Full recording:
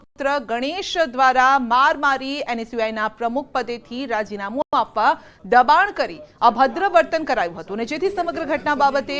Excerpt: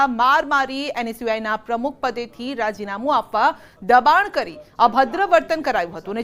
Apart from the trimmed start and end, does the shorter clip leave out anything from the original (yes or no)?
yes